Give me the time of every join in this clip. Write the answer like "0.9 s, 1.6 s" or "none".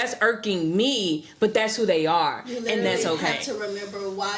none